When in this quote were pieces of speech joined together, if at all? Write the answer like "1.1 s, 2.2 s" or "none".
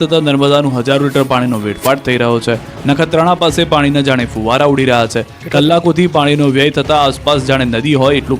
7.2 s

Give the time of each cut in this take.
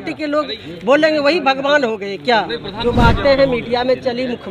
2.6 s

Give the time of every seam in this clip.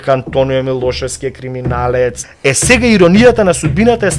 2.3 s

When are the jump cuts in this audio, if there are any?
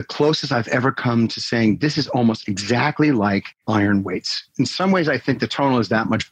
3.5 s, 4.7 s

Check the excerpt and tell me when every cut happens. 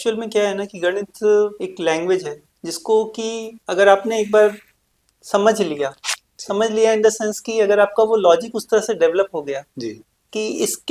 1.5 s, 3.5 s

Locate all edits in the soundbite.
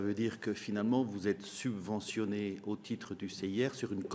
none

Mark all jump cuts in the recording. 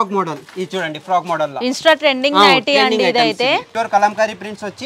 3.7 s

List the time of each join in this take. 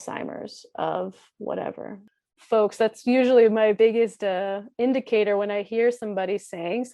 2.0 s

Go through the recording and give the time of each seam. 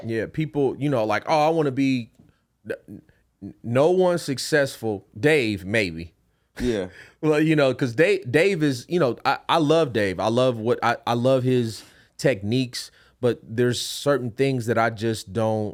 none

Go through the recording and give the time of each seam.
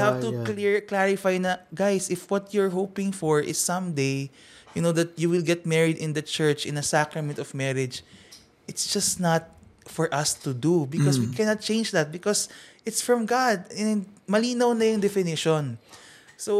none

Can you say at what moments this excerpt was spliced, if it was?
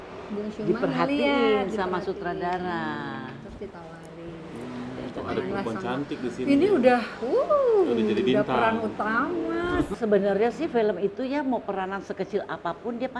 10.0 s

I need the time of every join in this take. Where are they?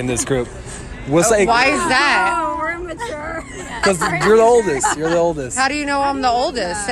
none

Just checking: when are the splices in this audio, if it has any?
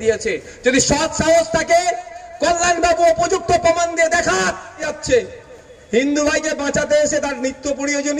4.9 s

